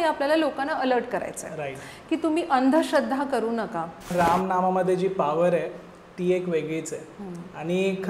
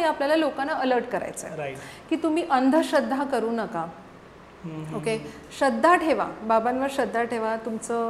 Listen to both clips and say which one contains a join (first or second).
first